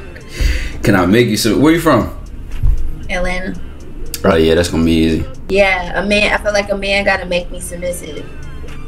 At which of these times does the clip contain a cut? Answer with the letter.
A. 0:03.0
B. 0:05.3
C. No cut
B